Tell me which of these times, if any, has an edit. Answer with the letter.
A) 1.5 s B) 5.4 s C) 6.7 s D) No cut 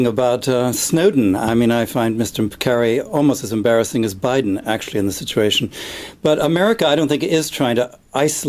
D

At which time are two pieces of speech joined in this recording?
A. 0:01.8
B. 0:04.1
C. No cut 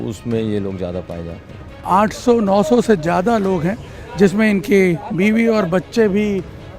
A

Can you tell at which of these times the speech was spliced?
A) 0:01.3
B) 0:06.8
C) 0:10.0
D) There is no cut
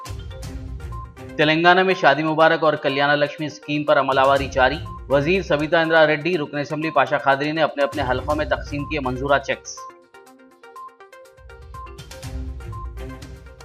A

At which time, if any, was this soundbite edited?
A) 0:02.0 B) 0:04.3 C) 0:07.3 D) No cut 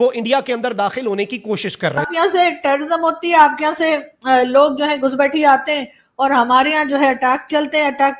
A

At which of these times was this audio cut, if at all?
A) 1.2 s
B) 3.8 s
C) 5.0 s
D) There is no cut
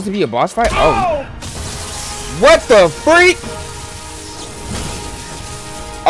A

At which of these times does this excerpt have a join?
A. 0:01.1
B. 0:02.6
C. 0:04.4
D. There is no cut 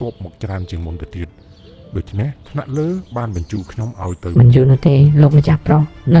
C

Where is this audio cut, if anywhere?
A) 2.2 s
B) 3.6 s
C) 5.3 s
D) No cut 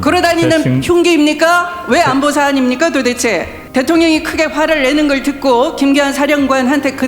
B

